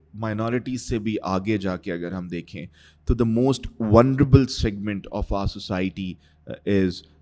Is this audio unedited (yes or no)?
yes